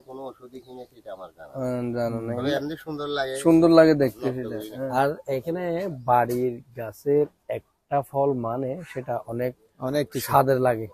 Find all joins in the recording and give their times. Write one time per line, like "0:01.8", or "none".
0:04.9